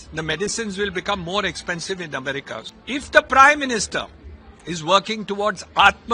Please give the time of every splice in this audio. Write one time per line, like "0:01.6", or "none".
0:02.7